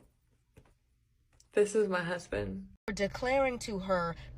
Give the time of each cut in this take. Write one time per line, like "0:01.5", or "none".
0:02.9